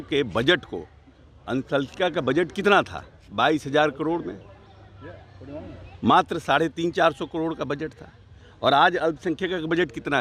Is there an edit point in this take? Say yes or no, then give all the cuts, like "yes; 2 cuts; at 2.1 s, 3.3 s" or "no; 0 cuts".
no; 0 cuts